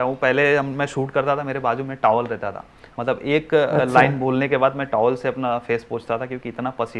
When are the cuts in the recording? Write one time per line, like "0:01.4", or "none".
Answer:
none